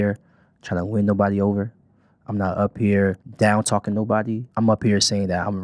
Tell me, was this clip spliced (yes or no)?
yes